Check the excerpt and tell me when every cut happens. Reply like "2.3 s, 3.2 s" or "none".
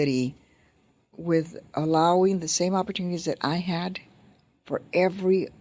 none